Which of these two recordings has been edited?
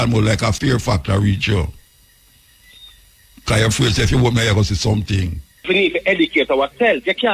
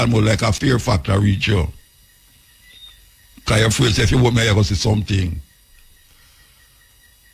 first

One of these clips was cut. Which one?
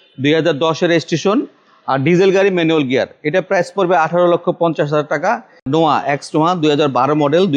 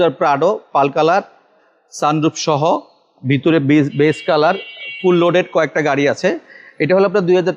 first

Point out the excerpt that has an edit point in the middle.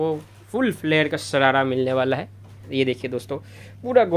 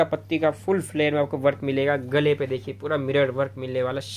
first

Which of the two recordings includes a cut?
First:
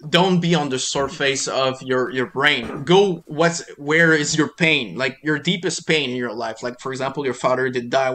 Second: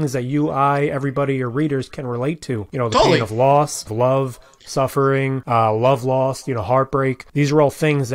second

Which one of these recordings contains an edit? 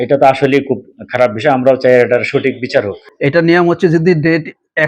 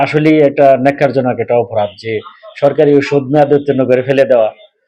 first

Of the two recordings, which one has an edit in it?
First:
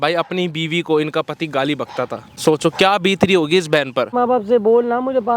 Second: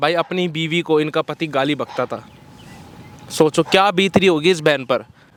first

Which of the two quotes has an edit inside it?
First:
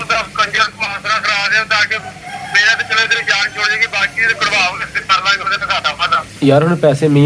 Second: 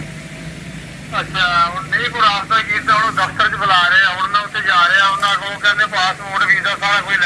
first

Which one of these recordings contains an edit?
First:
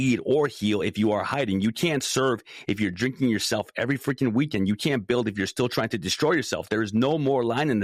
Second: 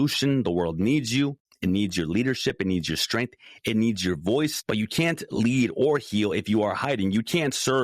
second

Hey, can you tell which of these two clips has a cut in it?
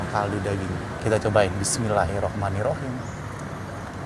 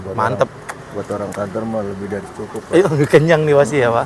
first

